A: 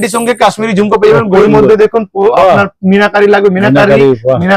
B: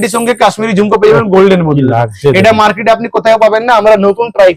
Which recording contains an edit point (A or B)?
A